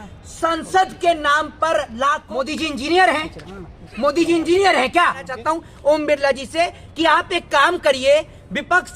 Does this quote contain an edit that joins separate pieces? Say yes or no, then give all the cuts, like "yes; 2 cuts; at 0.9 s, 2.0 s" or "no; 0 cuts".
yes; 2 cuts; at 2.2 s, 5.3 s